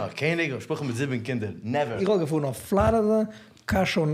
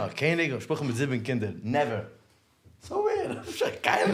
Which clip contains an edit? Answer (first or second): first